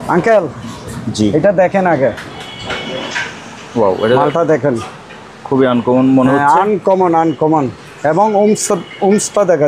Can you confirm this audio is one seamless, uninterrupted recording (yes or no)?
yes